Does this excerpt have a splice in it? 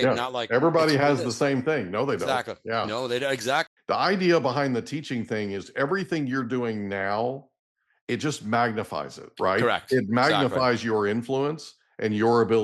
yes; 1 cut; at 3.7 s

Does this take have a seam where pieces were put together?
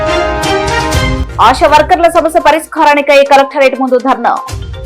no; 0 cuts

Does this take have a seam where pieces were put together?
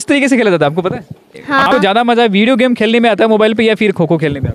yes; 1 cut; at 1.7 s

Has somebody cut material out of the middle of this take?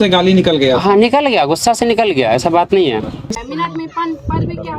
yes; 1 cut; at 3.4 s

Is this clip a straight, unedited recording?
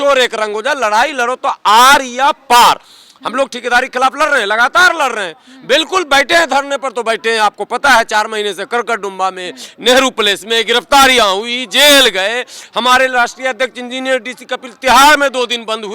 yes; 0 cuts

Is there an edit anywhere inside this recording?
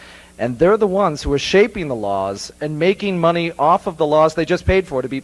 yes; 1 cut; at 2.6 s

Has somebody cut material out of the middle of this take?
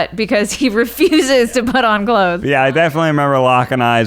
yes; 1 cut; at 2.4 s

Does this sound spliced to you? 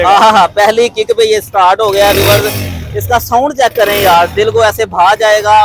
no; 0 cuts

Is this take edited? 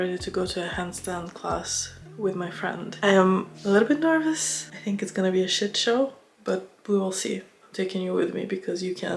no; 0 cuts

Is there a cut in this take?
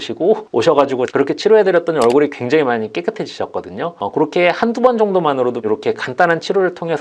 yes; 2 cuts; at 1.1 s, 5.6 s

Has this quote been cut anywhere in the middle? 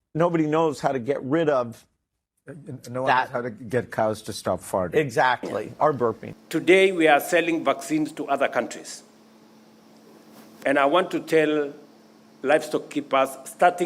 yes; 1 cut; at 6.3 s

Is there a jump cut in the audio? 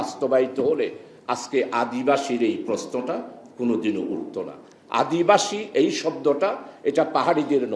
no; 0 cuts

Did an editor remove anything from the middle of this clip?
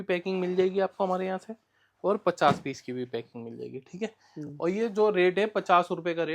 no; 0 cuts

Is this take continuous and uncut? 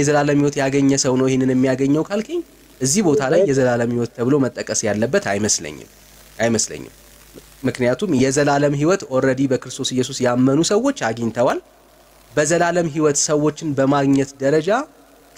yes; 0 cuts

